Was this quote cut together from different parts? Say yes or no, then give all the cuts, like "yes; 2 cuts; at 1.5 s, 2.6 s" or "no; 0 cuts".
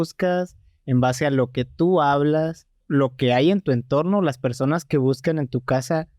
yes; 1 cut; at 2.8 s